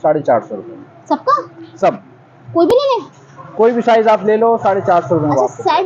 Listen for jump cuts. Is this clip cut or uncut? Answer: uncut